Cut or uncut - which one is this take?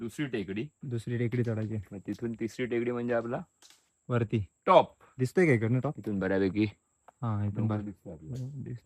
uncut